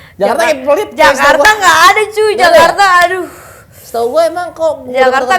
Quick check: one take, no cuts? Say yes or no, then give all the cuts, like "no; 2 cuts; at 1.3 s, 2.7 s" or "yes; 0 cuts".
yes; 0 cuts